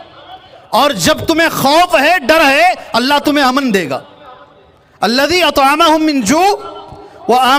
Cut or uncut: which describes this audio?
uncut